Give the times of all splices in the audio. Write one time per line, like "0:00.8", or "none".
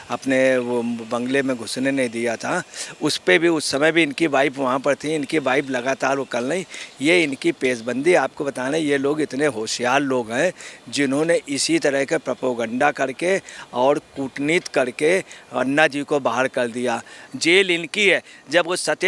0:17.2